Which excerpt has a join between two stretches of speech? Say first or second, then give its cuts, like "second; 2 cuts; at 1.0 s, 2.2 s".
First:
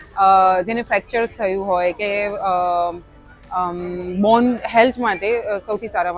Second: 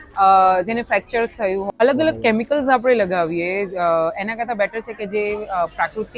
second; 1 cut; at 1.7 s